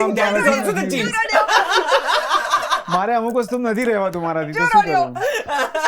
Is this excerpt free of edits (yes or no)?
yes